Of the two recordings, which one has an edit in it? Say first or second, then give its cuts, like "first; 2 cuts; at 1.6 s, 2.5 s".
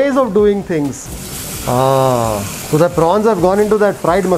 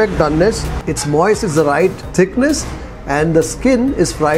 second; 1 cut; at 2.0 s